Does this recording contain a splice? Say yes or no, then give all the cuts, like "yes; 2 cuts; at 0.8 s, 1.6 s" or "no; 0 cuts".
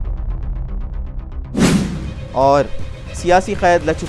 yes; 1 cut; at 2.1 s